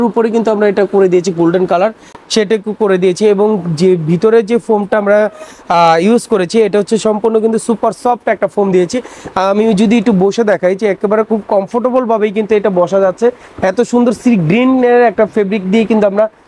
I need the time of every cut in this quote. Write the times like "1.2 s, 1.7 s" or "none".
none